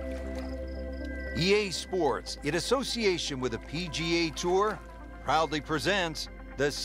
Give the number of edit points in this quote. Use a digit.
1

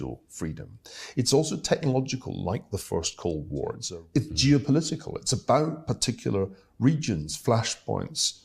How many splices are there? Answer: 1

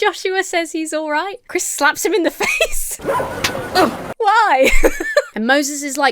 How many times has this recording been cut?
3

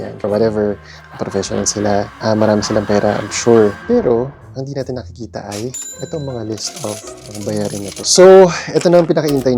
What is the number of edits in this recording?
1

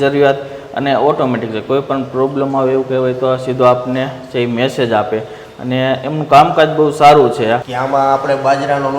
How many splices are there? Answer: 1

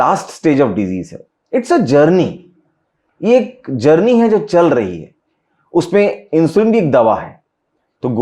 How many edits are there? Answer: 0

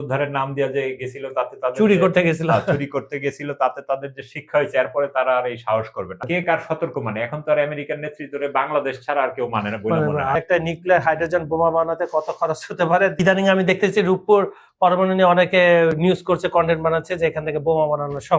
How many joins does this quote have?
3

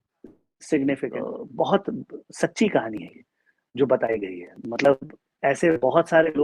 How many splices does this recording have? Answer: 1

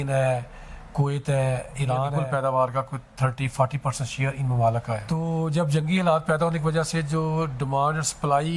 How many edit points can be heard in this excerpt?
2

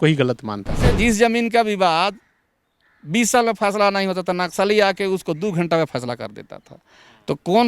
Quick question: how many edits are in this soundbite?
1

